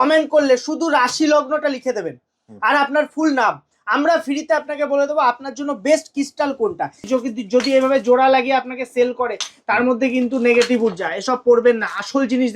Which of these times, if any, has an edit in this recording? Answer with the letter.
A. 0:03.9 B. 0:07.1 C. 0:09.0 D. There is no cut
B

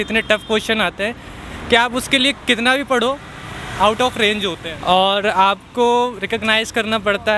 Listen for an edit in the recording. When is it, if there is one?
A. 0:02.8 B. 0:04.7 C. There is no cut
B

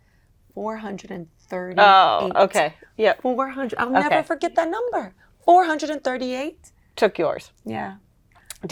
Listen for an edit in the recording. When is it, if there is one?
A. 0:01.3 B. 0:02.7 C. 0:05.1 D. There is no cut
D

